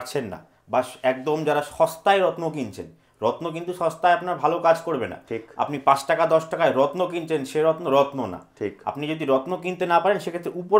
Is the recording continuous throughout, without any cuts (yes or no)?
yes